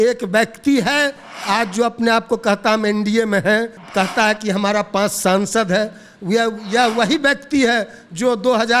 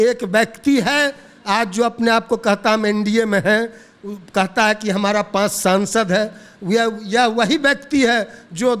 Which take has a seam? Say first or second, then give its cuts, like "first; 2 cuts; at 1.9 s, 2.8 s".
first; 1 cut; at 3.8 s